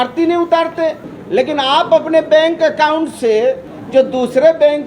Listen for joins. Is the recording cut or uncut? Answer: cut